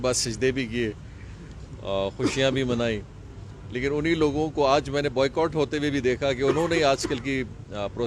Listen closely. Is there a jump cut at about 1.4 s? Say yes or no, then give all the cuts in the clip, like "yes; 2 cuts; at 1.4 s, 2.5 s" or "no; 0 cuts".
no; 0 cuts